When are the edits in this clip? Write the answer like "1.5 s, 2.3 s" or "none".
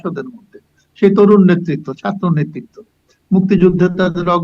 none

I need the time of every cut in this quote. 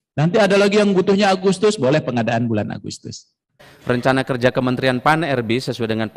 3.6 s

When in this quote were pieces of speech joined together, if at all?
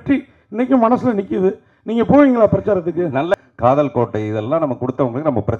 3.4 s

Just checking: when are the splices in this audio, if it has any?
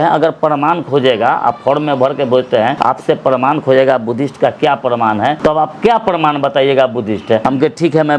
2.8 s, 5.4 s, 7.4 s

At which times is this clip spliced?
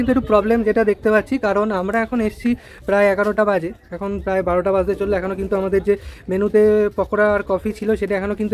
none

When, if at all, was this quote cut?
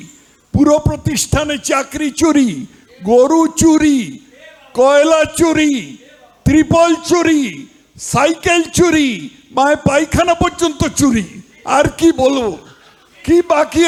none

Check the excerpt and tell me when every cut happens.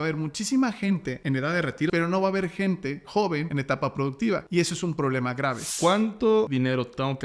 1.6 s, 3.5 s, 4.4 s, 5.7 s, 6.5 s

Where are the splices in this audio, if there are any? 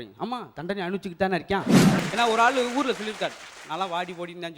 2.0 s

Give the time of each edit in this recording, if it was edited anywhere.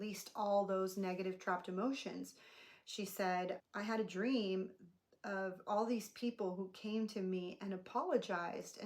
3.6 s

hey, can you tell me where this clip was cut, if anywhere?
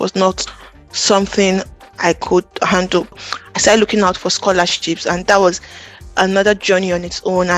3.1 s

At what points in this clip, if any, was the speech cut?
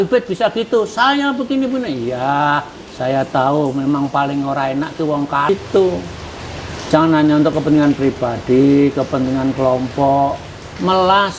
5.5 s

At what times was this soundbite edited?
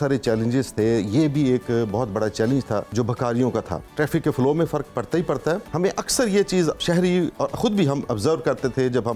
2.9 s, 3.9 s, 5.7 s, 6.8 s

